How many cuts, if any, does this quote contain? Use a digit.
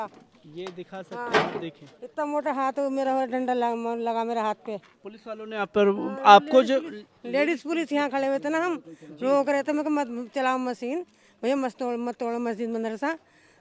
0